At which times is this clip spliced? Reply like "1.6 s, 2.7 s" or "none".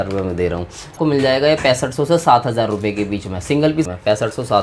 1.0 s, 3.9 s